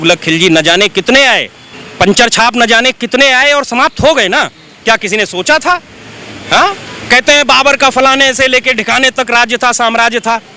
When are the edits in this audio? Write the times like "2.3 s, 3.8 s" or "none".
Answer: none